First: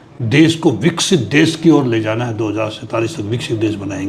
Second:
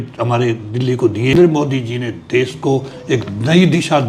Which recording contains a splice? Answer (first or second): second